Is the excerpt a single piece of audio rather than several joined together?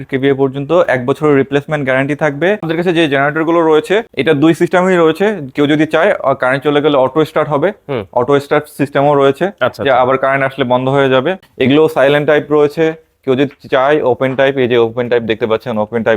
no; 3 cuts; at 2.6 s, 4.1 s, 11.4 s

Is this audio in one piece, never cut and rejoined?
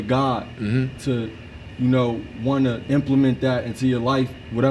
no; 1 cut; at 2.8 s

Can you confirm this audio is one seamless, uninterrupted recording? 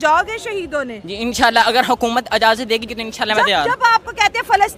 no; 1 cut; at 2.8 s

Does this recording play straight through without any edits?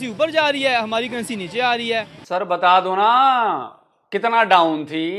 no; 1 cut; at 2.2 s

